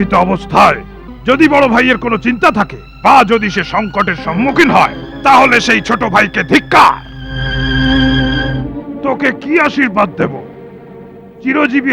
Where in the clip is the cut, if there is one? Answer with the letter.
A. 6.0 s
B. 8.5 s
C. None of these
B